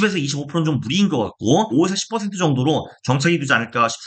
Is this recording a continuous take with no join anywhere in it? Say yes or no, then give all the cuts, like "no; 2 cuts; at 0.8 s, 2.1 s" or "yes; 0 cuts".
no; 1 cut; at 1.7 s